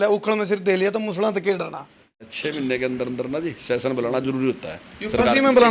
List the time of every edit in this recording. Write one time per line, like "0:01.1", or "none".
0:02.3